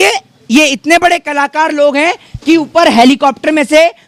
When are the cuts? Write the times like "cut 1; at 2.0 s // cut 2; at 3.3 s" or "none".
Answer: none

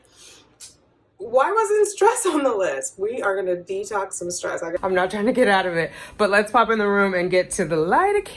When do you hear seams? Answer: cut 1; at 4.8 s

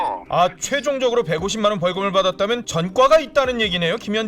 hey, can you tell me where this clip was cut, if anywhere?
cut 1; at 2.7 s

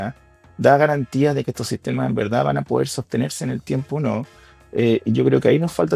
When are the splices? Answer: none

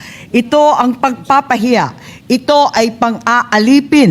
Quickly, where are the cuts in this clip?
none

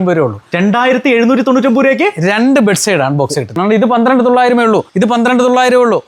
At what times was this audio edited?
cut 1; at 3.5 s // cut 2; at 4.9 s

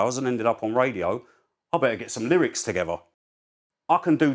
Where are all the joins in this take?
cut 1; at 3.1 s

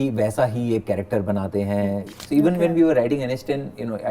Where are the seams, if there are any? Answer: cut 1; at 2.1 s

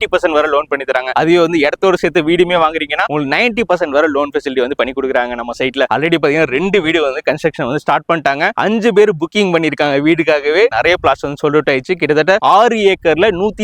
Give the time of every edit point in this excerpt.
none

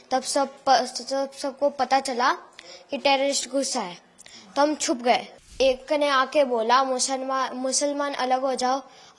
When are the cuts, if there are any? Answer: cut 1; at 5.5 s

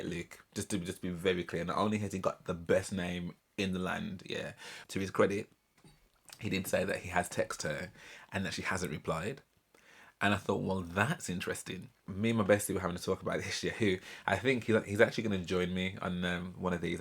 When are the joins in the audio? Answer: cut 1; at 4.8 s // cut 2; at 12.0 s

